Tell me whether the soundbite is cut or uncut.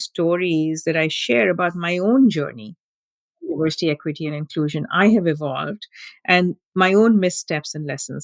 cut